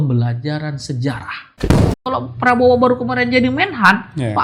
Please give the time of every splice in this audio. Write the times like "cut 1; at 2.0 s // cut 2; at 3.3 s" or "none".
cut 1; at 1.9 s